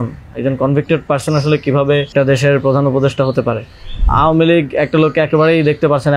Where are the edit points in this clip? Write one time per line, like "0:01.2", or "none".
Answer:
0:02.1
0:04.0